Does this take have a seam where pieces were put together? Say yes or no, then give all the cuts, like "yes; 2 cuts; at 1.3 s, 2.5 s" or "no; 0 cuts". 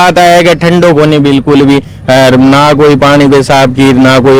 no; 0 cuts